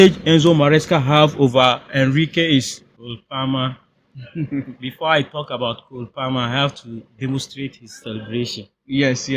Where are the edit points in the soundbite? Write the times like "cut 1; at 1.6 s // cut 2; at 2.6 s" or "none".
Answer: cut 1; at 3.1 s